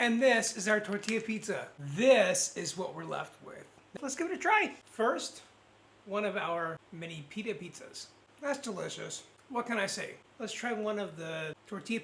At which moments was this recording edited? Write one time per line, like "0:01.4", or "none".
0:01.8
0:03.9
0:06.9
0:08.2
0:10.2